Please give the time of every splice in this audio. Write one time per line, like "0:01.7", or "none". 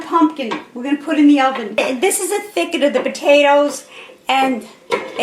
0:01.8